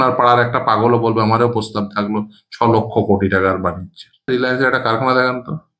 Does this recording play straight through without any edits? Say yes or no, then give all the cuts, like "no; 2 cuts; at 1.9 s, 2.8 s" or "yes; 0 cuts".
no; 1 cut; at 4.3 s